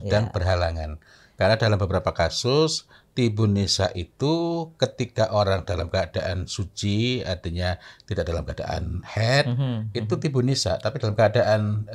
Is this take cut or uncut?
uncut